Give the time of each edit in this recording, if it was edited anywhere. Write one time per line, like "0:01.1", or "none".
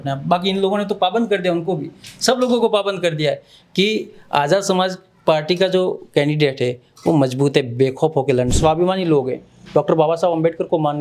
0:08.5